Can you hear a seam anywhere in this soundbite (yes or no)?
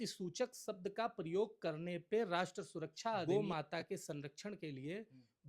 yes